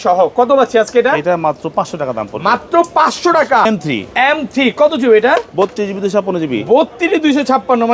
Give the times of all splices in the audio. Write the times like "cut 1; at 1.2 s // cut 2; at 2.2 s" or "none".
cut 1; at 3.7 s